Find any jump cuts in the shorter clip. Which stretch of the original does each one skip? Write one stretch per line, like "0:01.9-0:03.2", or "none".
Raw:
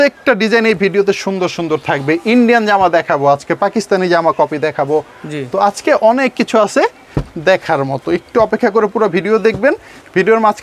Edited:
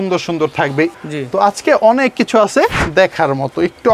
0:02.2-0:05.1
0:07.0-0:07.3